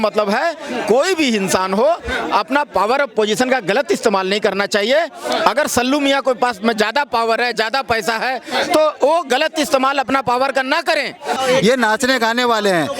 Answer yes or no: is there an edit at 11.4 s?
yes